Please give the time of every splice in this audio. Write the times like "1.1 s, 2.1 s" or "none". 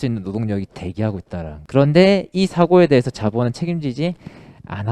1.6 s